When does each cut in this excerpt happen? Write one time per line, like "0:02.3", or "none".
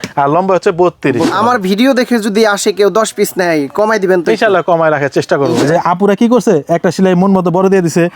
0:01.3
0:05.6